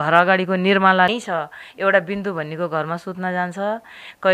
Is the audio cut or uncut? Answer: cut